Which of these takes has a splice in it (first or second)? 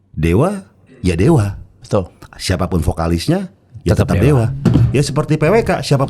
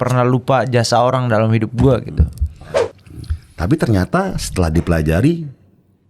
second